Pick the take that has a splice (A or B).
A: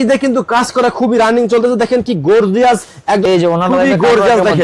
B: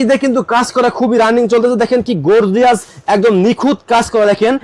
A